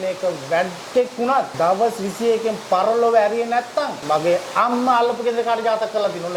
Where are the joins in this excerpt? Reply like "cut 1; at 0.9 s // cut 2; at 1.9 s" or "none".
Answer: cut 1; at 1.5 s // cut 2; at 4.0 s